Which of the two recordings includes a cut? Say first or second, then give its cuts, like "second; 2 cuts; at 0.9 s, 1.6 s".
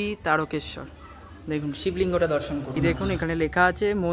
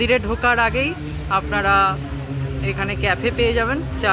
first; 1 cut; at 2.7 s